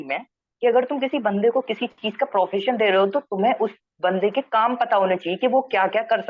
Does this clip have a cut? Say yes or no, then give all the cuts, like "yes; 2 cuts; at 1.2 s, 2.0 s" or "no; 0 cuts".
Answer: no; 0 cuts